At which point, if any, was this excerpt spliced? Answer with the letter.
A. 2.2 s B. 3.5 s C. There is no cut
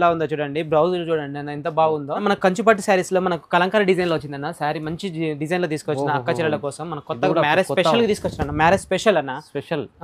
A